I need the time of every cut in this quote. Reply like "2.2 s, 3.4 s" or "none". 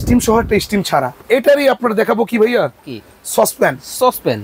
1.2 s